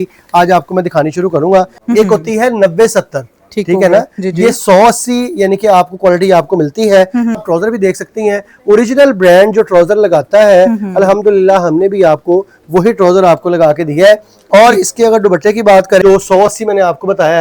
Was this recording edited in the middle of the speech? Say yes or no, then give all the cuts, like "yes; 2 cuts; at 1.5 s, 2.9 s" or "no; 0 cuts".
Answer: yes; 3 cuts; at 1.8 s, 7.4 s, 16.0 s